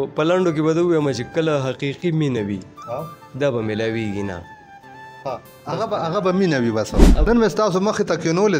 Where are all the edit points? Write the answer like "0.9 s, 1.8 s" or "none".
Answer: 7.1 s

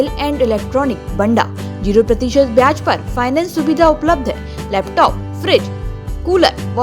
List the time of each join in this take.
none

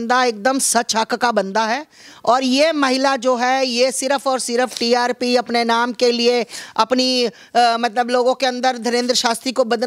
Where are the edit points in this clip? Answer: none

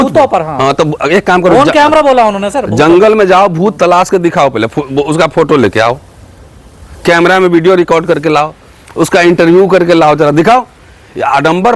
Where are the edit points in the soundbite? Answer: none

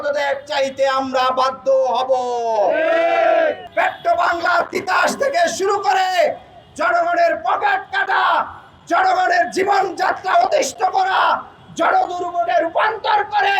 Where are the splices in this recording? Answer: 3.6 s

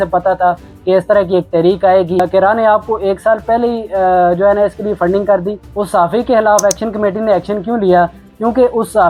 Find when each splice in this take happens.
none

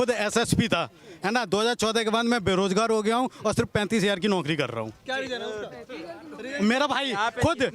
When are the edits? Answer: none

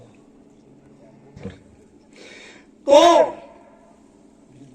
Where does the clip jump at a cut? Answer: 1.5 s

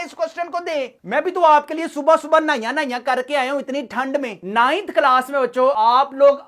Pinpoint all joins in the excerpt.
4.4 s, 5.8 s

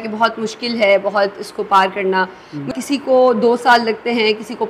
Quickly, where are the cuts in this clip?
2.7 s

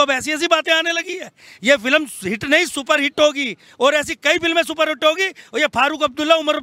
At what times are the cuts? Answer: none

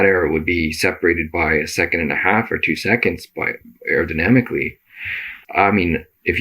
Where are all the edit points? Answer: 5.3 s

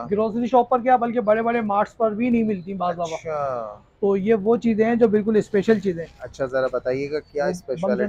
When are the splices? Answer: none

